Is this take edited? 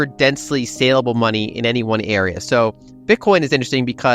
yes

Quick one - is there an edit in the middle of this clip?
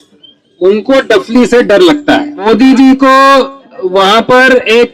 yes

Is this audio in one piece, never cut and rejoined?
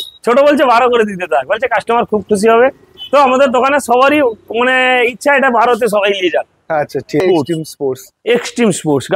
no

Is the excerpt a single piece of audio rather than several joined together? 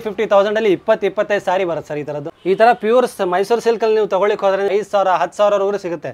no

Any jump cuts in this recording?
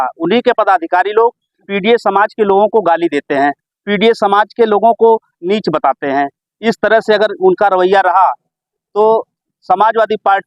no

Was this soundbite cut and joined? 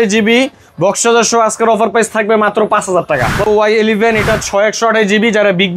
yes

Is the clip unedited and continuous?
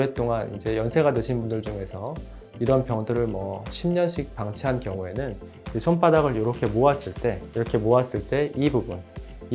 yes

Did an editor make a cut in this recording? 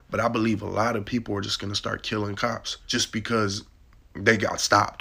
yes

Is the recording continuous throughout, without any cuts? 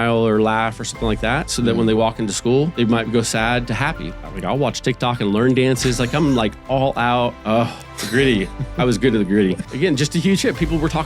no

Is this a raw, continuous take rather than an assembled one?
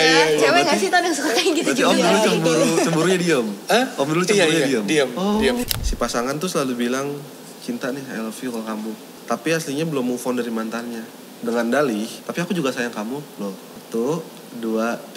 no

